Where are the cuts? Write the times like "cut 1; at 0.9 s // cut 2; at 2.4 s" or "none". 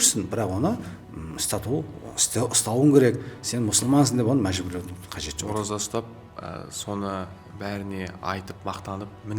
cut 1; at 5.3 s